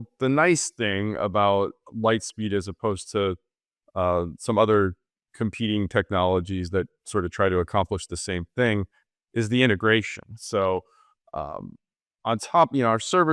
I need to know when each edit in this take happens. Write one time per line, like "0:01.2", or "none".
none